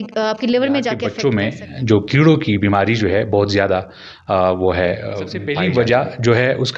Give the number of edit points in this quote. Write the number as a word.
two